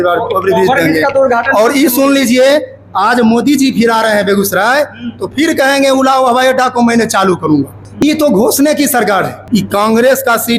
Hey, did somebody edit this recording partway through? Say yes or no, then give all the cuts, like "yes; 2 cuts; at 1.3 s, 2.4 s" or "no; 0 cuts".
yes; 2 cuts; at 7.8 s, 9.4 s